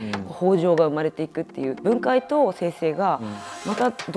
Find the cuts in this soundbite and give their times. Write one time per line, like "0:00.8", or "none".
0:01.8